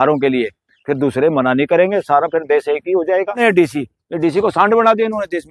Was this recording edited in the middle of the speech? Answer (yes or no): yes